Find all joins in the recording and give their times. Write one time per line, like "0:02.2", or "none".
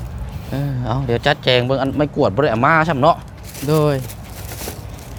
none